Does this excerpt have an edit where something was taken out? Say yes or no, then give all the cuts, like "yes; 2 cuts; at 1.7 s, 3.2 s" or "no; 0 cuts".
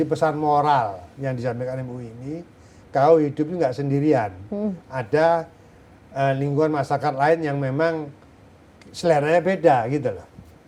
no; 0 cuts